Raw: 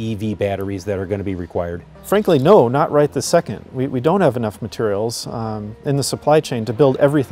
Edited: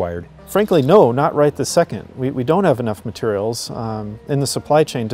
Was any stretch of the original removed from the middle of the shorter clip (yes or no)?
no